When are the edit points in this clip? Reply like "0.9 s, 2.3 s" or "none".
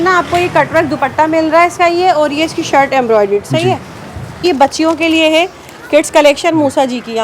4.4 s